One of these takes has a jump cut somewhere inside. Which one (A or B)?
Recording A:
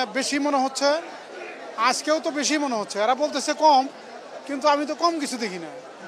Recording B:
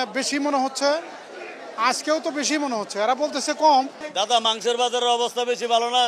B